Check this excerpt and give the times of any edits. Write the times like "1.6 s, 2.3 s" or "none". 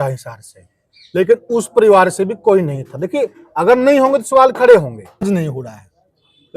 5.3 s